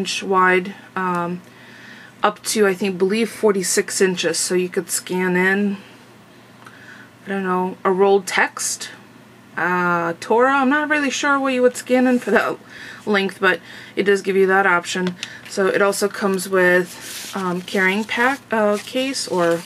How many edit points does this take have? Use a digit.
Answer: 1